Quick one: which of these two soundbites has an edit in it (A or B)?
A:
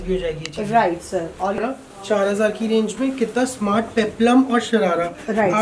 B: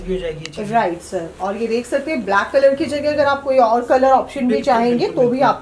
A